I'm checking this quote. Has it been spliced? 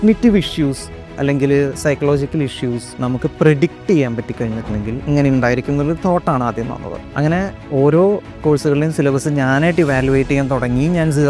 yes; 2 cuts; at 5.0 s, 7.0 s

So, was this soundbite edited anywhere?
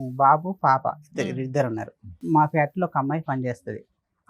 yes; 1 cut; at 2.2 s

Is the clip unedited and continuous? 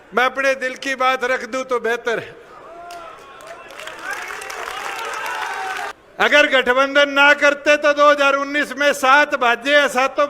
no; 1 cut; at 5.9 s

